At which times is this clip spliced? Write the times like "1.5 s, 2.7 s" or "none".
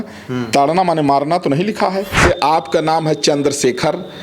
2.2 s